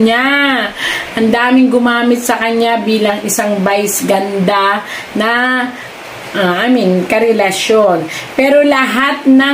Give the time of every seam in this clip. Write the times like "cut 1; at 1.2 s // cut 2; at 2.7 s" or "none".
none